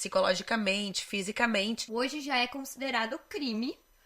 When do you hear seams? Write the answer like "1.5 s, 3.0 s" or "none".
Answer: 1.8 s